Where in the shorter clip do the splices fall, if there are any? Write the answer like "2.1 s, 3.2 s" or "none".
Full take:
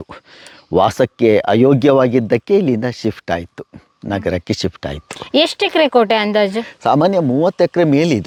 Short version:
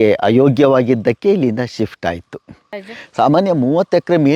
2.9 s